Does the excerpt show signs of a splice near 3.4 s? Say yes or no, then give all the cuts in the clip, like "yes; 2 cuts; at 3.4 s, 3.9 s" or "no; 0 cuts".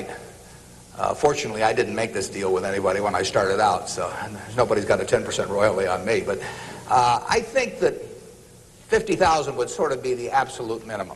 no; 1 cut; at 6.2 s